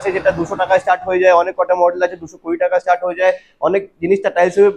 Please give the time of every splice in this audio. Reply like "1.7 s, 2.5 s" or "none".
none